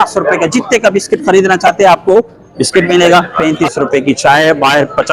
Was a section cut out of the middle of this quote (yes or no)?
yes